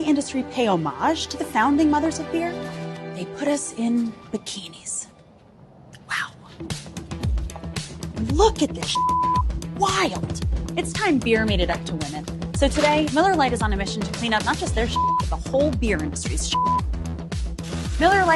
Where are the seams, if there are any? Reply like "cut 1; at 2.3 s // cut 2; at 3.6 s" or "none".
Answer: cut 1; at 6.5 s